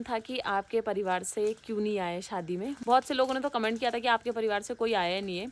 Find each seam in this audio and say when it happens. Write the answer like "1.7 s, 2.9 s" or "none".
none